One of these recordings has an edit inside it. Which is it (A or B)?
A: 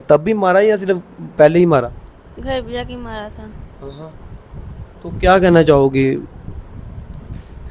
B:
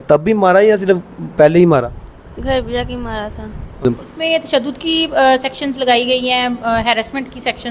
B